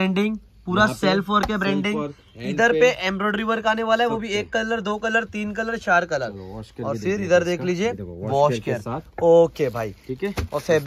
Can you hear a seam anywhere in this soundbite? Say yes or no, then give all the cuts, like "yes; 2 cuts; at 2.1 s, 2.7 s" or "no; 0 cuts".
no; 0 cuts